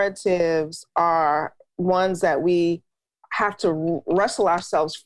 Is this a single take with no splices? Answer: yes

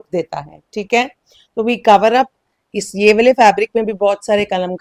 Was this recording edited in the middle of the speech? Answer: no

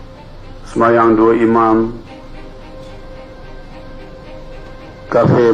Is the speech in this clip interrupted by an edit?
no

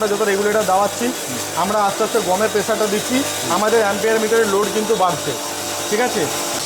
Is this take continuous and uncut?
yes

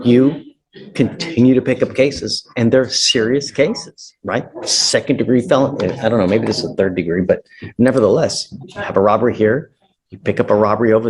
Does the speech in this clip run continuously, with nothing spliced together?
yes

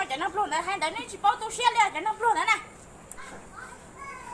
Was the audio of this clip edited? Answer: yes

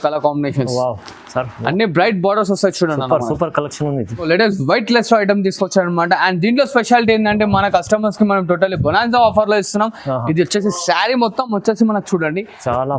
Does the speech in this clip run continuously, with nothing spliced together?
no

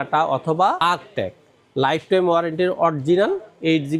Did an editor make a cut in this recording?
no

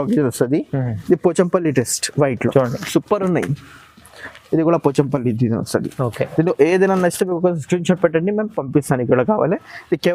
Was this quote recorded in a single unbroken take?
yes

